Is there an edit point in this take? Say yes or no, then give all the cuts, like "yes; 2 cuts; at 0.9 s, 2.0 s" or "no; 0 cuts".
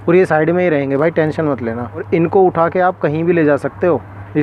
no; 0 cuts